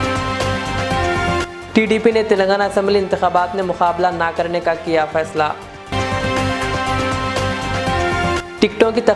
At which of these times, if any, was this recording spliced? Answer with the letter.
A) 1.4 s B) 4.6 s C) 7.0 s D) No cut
D